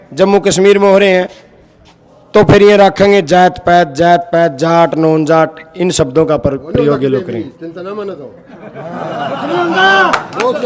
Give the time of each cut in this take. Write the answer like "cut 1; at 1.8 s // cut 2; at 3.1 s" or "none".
none